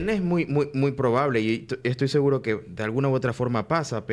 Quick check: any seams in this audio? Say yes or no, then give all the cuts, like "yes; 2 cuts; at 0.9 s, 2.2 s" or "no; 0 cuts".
no; 0 cuts